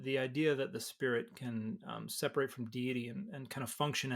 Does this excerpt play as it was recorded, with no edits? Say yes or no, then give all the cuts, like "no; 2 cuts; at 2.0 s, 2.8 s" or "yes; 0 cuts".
yes; 0 cuts